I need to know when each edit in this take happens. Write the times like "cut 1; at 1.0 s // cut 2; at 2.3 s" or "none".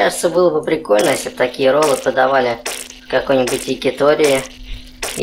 none